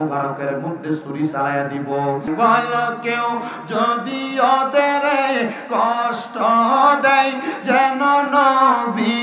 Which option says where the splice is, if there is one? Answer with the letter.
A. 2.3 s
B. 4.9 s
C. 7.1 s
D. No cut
A